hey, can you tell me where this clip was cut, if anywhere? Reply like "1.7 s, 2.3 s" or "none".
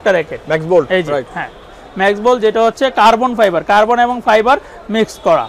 none